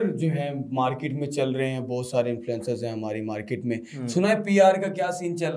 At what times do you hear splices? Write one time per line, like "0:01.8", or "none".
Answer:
none